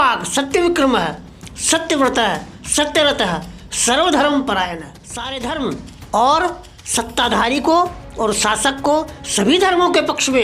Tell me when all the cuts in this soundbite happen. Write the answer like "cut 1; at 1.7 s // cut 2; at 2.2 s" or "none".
cut 1; at 5.3 s